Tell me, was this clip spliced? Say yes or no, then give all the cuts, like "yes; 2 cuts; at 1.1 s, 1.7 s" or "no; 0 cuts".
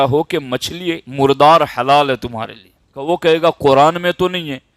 yes; 2 cuts; at 1.0 s, 3.0 s